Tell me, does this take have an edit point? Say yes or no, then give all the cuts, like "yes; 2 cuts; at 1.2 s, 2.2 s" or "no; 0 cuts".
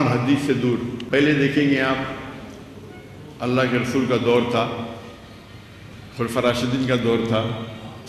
yes; 1 cut; at 1.0 s